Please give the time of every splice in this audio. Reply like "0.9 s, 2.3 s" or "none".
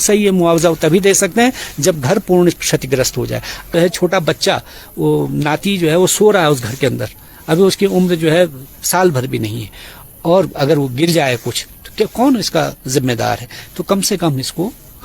3.7 s